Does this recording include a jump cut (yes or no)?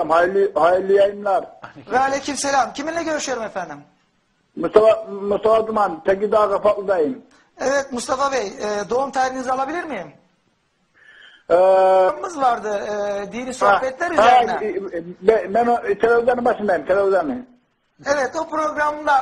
no